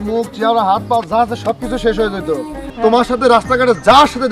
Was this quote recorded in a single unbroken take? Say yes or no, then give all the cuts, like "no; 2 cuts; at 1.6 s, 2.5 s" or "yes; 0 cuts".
no; 1 cut; at 2.6 s